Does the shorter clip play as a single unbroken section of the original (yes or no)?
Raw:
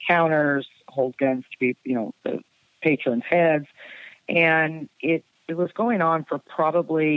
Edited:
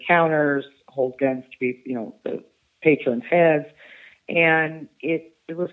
yes